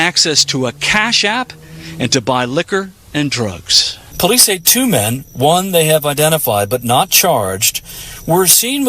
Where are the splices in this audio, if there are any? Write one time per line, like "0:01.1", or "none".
0:04.0